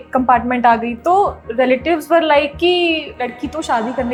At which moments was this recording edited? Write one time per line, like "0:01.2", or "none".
none